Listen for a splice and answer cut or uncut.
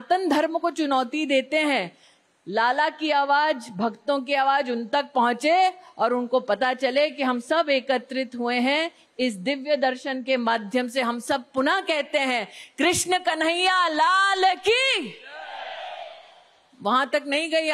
uncut